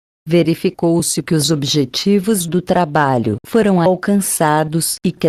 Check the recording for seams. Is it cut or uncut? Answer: uncut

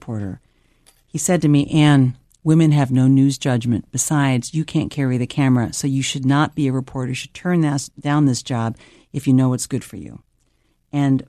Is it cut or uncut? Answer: uncut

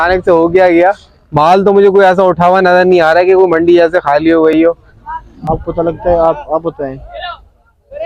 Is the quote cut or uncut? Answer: cut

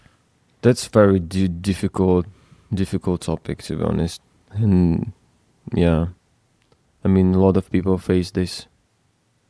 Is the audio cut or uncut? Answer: uncut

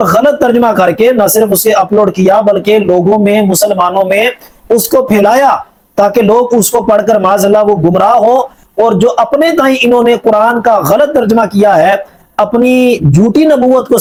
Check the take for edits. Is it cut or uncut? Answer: uncut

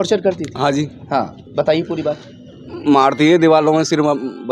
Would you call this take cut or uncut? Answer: uncut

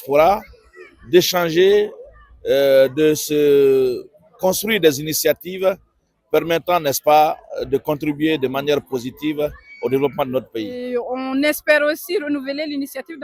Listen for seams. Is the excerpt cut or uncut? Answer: cut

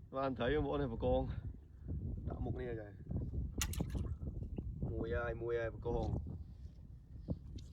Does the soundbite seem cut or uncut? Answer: uncut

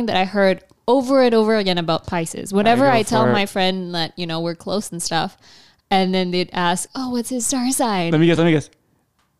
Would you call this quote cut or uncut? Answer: uncut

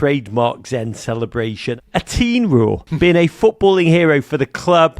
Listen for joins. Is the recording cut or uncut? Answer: cut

